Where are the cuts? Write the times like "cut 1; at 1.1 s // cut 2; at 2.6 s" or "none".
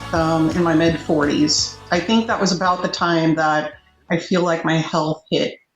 cut 1; at 1.8 s

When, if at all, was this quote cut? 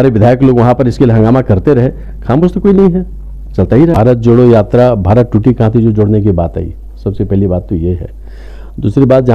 cut 1; at 3.9 s

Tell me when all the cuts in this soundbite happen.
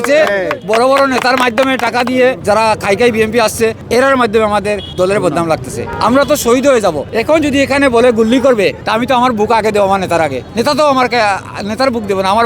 cut 1; at 2.4 s // cut 2; at 3.8 s // cut 3; at 4.9 s // cut 4; at 5.9 s // cut 5; at 7.1 s // cut 6; at 8.8 s // cut 7; at 10.4 s

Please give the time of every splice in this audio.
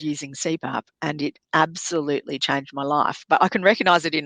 cut 1; at 3.2 s

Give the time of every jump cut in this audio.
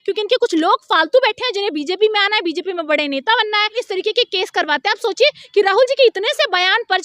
cut 1; at 3.8 s

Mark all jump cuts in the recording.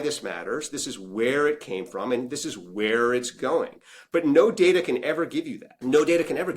cut 1; at 5.6 s

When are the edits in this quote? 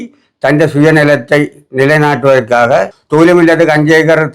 cut 1; at 2.9 s

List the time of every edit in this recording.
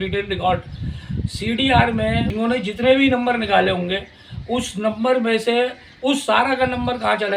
cut 1; at 2.3 s

